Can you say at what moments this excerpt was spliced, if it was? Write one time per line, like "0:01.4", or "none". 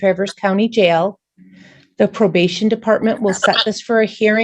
none